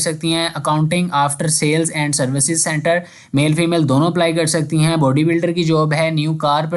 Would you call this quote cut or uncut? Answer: uncut